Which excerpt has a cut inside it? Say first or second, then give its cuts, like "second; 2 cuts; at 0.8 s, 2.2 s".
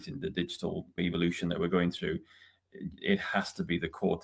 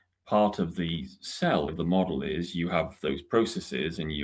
second; 1 cut; at 1.7 s